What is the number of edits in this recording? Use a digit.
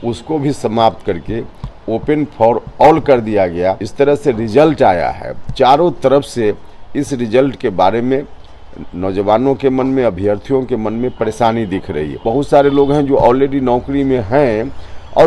2